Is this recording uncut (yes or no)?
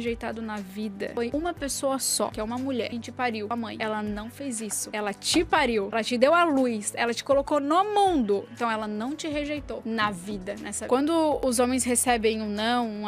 yes